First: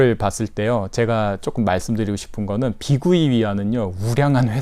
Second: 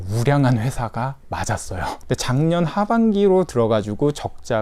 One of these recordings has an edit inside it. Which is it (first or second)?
second